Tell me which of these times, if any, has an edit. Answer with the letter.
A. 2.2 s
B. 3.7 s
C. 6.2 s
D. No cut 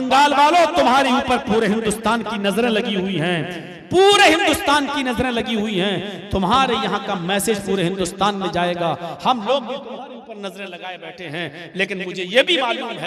D